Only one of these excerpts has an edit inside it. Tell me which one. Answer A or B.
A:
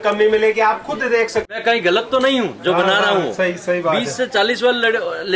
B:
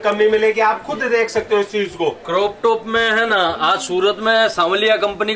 A